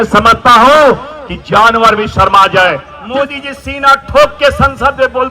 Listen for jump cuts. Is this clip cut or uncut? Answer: cut